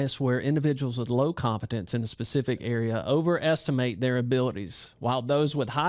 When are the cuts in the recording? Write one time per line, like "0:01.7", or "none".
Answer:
none